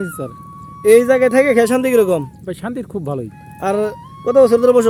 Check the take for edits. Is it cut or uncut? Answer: uncut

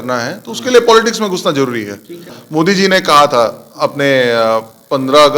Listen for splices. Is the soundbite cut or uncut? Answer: cut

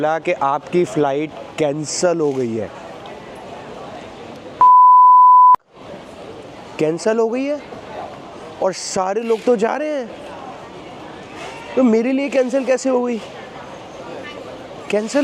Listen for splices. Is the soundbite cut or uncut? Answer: uncut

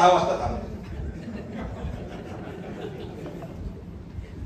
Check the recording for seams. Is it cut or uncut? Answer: uncut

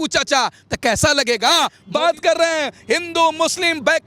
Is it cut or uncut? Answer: cut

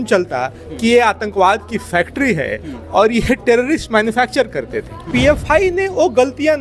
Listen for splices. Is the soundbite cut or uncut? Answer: cut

